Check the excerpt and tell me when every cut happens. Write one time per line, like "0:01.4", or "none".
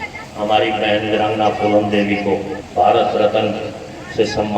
0:02.6